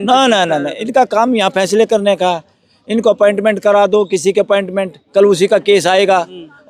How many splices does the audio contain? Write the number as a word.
zero